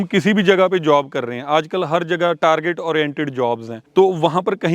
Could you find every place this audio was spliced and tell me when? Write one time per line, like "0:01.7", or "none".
0:03.7